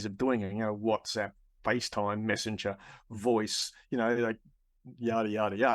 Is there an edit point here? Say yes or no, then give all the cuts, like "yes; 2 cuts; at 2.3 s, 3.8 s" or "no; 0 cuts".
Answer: no; 0 cuts